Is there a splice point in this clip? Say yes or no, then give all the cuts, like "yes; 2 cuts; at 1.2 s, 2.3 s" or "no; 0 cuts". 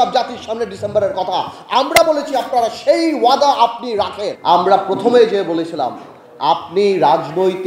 yes; 1 cut; at 4.2 s